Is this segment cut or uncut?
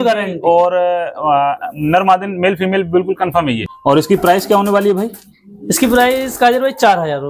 cut